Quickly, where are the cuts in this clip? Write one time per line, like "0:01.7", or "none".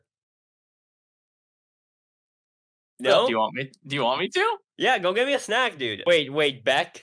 0:05.9